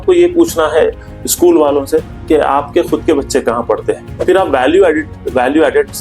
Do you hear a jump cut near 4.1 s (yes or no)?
yes